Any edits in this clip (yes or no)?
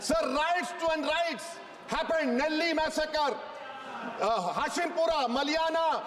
no